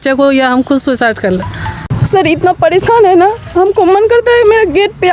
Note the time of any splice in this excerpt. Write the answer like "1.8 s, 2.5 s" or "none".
1.7 s